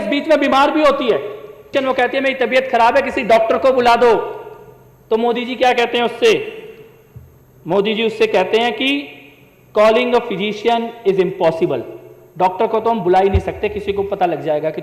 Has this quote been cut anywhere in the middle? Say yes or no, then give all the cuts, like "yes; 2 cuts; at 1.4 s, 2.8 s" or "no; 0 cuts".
yes; 1 cut; at 1.6 s